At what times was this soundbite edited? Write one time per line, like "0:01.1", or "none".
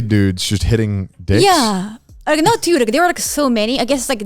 none